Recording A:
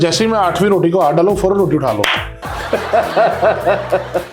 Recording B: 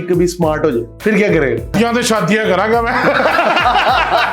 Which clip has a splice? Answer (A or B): B